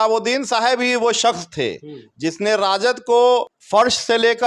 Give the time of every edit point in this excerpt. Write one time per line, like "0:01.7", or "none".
0:03.6